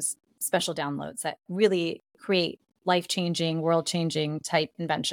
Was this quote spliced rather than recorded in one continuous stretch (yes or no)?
no